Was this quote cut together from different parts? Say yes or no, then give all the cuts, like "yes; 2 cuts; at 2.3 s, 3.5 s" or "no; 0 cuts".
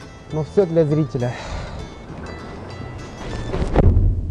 yes; 1 cut; at 2.5 s